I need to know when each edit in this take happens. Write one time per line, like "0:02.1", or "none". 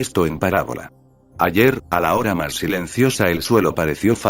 0:02.9